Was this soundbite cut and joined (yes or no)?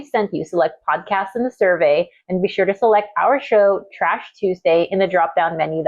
no